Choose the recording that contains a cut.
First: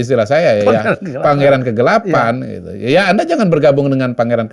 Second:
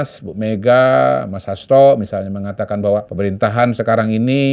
second; 1 cut; at 3.1 s

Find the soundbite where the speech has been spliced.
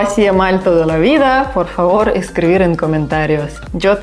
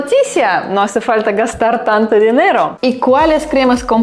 second; 1 cut; at 2.7 s

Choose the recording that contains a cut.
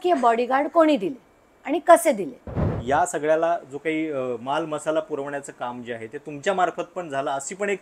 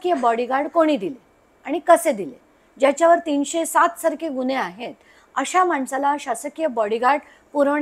first; 1 cut; at 2.6 s

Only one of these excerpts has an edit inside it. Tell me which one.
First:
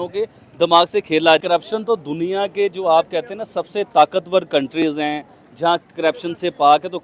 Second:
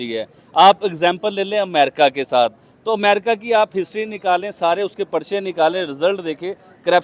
first; 1 cut; at 1.4 s

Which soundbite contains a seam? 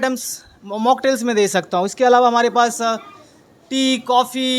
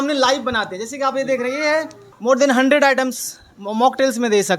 second; 1 cut; at 2.0 s

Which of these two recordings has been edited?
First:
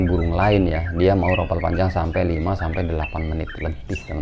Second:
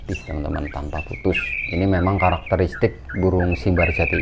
second; 1 cut; at 1.5 s

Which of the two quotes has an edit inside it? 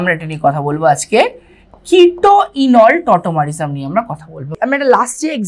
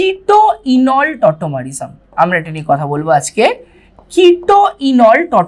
first; 1 cut; at 4.5 s

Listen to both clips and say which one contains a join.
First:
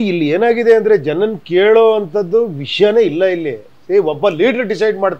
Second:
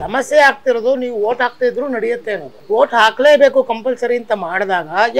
second; 1 cut; at 2.5 s

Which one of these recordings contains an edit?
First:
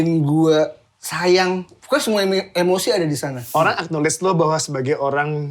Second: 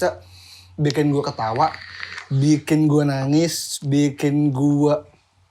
first; 1 cut; at 3.4 s

